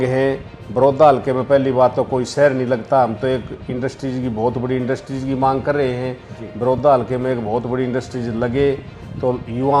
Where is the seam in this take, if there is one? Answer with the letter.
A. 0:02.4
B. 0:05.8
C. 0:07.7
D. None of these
D